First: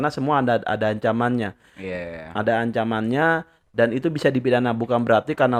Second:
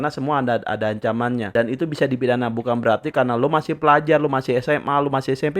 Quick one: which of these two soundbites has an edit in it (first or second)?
second